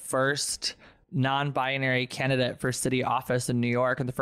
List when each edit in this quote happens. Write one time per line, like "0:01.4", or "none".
none